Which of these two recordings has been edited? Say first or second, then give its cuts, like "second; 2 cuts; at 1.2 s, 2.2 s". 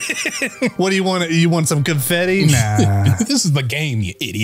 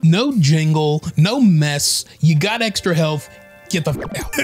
first; 2 cuts; at 0.8 s, 3.1 s